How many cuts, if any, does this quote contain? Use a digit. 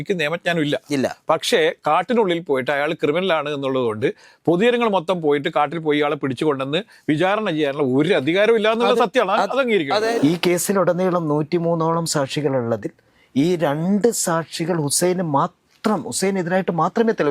1